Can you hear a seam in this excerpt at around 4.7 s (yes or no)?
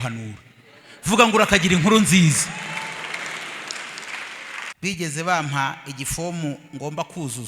yes